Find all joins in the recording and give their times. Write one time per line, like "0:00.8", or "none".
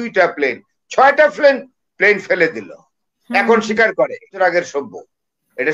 0:04.3